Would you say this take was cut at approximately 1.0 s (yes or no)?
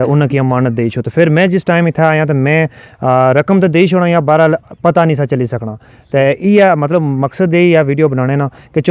no